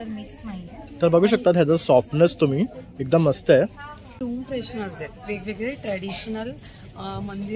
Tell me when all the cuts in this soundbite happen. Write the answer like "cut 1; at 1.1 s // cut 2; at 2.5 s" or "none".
cut 1; at 4.1 s